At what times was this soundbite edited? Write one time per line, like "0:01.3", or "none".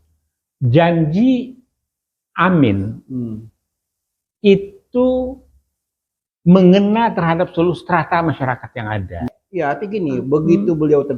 0:09.4